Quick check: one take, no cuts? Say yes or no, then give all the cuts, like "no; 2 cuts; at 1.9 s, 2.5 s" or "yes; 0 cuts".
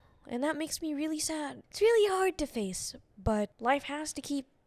no; 2 cuts; at 1.6 s, 3.5 s